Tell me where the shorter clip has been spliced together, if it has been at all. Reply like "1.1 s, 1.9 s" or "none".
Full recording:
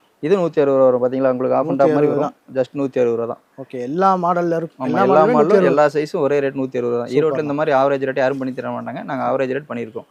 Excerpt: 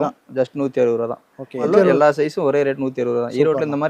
1.7 s